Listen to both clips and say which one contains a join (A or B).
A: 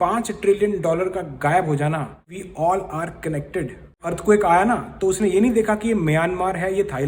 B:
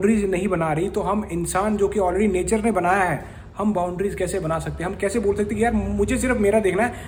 A